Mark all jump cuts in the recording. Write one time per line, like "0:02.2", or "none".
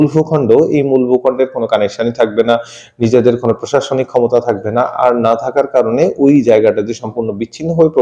none